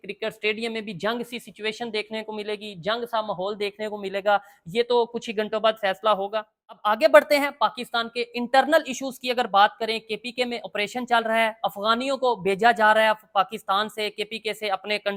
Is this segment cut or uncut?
uncut